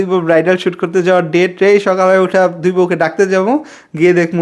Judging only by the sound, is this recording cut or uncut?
uncut